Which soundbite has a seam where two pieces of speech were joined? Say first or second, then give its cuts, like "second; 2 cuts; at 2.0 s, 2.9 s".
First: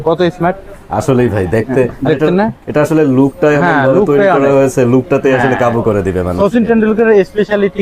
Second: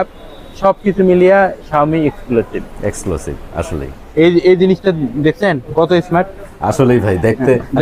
second; 1 cut; at 3.9 s